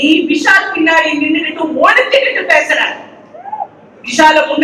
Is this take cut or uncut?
uncut